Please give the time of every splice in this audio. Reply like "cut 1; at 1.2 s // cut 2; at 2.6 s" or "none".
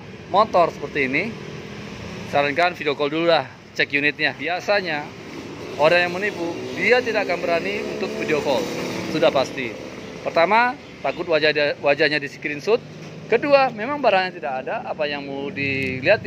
cut 1; at 4.4 s